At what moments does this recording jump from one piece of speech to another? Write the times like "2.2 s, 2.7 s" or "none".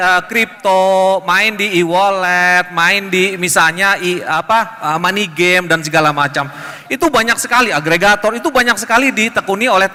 none